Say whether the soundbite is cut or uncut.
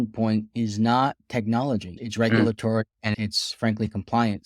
cut